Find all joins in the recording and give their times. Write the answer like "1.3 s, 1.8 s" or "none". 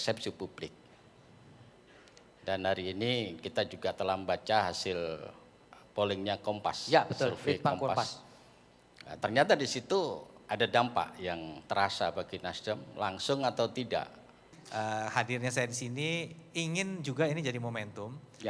14.5 s